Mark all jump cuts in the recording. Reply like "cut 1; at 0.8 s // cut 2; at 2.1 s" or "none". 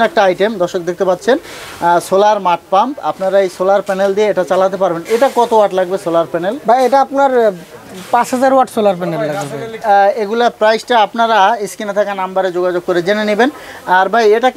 none